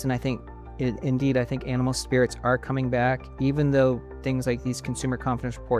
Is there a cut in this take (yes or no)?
no